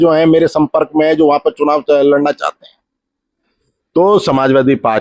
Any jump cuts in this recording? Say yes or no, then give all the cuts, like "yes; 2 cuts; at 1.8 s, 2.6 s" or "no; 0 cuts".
no; 0 cuts